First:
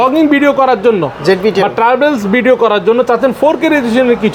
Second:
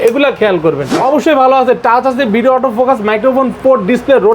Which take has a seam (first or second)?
second